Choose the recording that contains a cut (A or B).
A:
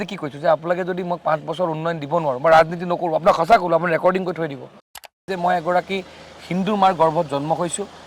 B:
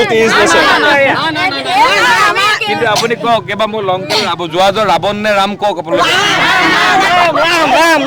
A